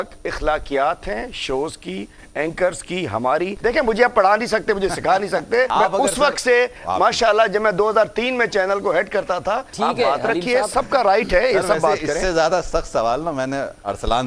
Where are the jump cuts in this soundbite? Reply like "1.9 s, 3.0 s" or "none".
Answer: 3.6 s, 5.7 s, 9.7 s